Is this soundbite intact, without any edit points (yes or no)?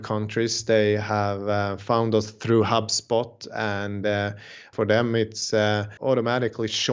no